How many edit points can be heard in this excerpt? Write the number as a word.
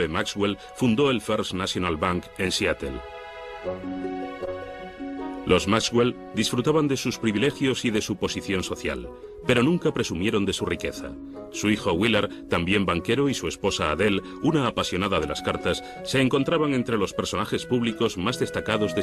zero